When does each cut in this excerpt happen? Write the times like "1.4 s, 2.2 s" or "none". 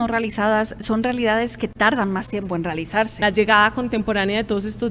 3.2 s

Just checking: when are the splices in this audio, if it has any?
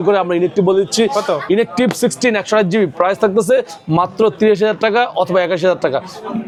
none

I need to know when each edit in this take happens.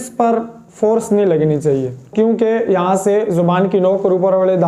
2.1 s

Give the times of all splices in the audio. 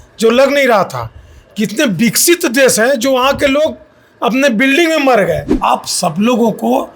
5.5 s

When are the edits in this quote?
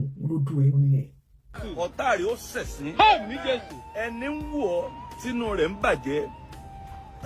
1.6 s

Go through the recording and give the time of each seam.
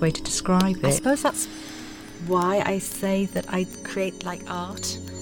none

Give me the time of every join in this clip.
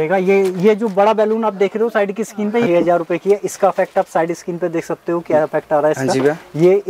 2.6 s

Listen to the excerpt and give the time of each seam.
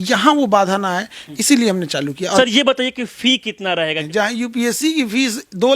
2.4 s, 4.0 s

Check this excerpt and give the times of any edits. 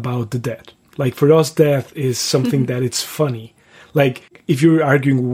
4.3 s

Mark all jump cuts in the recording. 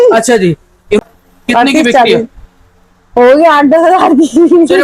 1.0 s

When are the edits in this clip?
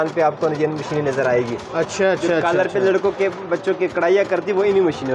none

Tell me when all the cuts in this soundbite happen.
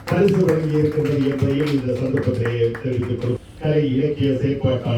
3.4 s

